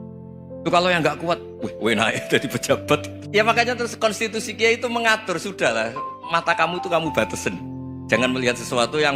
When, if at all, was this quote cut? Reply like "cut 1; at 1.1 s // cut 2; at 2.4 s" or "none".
cut 1; at 3.2 s